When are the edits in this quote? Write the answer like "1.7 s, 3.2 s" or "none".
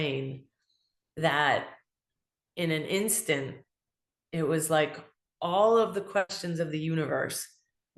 6.4 s